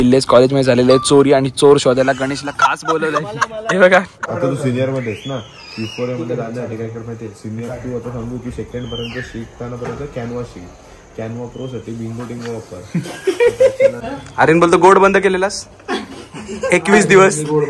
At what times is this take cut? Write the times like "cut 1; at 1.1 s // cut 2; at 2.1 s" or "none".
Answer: cut 1; at 4.3 s // cut 2; at 14.0 s